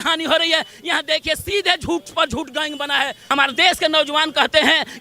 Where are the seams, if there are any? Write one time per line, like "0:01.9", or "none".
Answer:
0:03.2